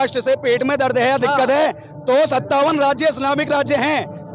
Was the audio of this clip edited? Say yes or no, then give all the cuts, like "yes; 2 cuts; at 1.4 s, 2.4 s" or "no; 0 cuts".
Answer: no; 0 cuts